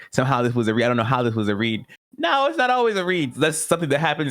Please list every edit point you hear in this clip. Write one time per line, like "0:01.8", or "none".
0:03.3